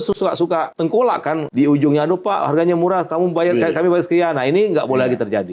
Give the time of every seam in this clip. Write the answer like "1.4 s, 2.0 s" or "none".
1.0 s